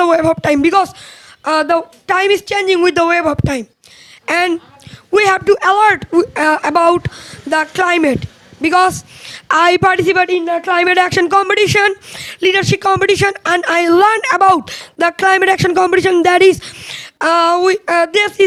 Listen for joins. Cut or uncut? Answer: uncut